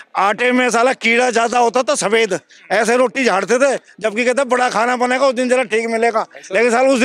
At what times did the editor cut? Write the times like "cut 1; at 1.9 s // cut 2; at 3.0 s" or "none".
none